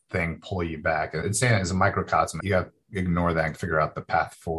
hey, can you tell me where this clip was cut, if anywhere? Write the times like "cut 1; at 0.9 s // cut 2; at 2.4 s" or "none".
cut 1; at 1.2 s // cut 2; at 2.4 s // cut 3; at 3.6 s